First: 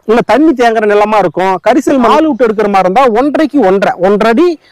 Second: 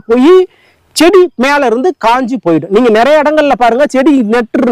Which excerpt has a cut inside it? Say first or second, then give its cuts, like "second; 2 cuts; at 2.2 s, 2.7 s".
first; 1 cut; at 2.1 s